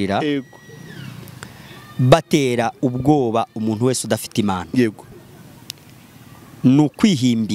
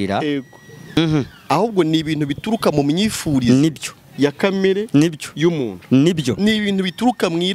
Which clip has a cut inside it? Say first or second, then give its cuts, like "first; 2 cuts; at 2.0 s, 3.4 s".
second; 1 cut; at 1.0 s